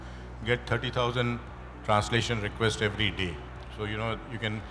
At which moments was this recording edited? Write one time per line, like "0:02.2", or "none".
none